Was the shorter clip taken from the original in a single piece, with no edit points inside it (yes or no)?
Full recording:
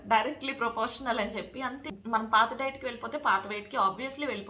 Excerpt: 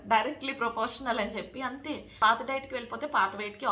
no